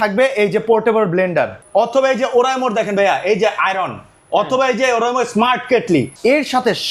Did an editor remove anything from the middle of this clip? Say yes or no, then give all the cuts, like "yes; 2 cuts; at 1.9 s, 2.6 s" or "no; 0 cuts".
yes; 2 cuts; at 1.6 s, 6.1 s